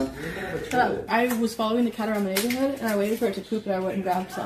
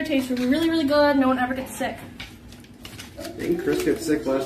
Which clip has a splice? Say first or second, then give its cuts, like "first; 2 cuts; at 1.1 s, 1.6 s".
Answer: first; 1 cut; at 1.0 s